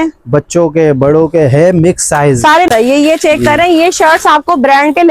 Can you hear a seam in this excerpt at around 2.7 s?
yes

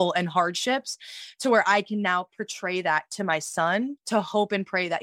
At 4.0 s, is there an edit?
yes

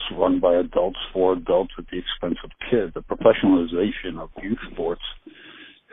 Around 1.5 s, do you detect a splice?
no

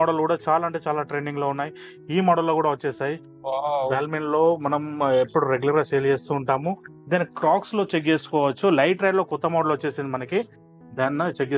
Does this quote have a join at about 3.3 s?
yes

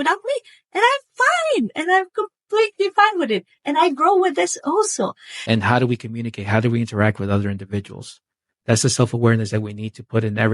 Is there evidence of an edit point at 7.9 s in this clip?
no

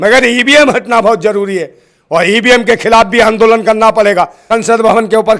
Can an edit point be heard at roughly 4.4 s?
yes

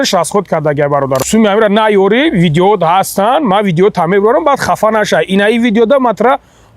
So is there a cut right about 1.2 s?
yes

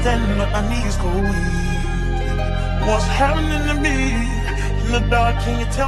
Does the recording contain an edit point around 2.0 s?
no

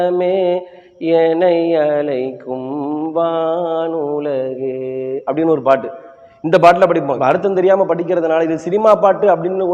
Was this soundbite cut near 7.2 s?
yes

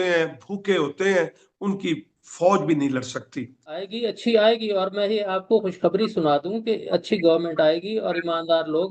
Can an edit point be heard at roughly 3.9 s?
yes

